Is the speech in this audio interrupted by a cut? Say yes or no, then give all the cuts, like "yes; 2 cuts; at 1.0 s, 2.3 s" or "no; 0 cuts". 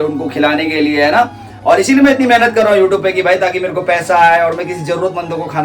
no; 0 cuts